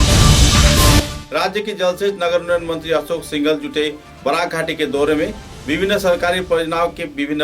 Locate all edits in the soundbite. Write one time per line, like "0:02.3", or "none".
0:01.1